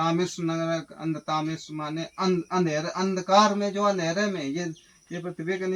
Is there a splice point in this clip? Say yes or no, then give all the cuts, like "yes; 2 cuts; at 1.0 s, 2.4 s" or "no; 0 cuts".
no; 0 cuts